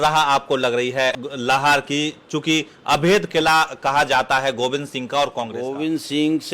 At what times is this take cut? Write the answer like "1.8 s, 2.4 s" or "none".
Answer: 1.2 s, 5.6 s